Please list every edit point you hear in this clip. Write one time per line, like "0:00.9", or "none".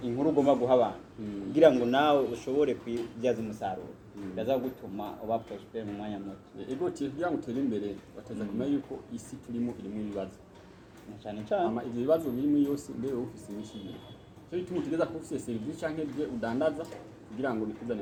none

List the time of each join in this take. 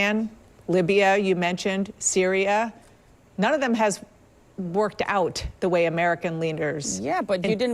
none

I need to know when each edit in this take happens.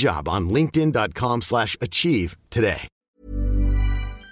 0:03.0

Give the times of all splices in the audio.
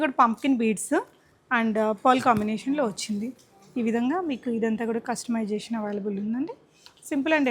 none

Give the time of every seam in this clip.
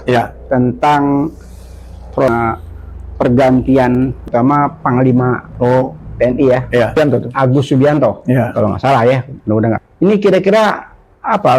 0:02.2
0:04.3
0:07.0
0:09.8

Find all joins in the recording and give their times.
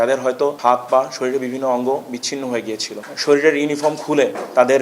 0:03.0

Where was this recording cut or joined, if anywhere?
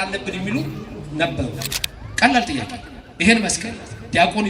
0:01.7

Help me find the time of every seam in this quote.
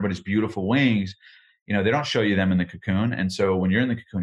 none

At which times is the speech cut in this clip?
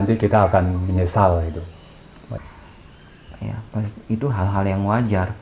0:02.4

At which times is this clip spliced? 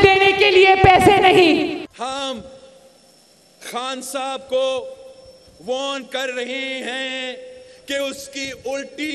0:01.9

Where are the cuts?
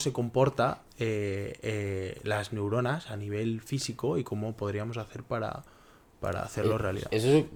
none

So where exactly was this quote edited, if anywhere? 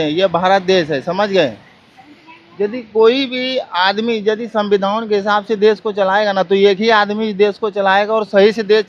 none

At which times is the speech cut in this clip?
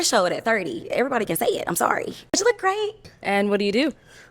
0:02.4
0:03.1

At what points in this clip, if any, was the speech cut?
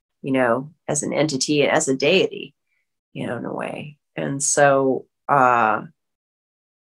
none

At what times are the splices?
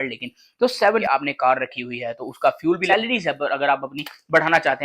0:01.0
0:02.8

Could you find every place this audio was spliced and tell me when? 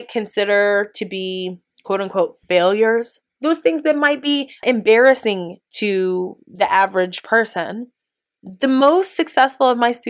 0:03.3
0:04.6

